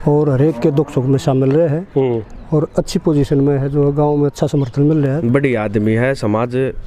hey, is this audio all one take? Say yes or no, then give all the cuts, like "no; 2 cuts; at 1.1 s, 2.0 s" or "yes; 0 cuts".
no; 1 cut; at 5.2 s